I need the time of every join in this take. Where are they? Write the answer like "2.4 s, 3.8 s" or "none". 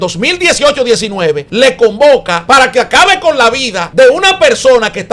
1.5 s, 2.3 s, 3.8 s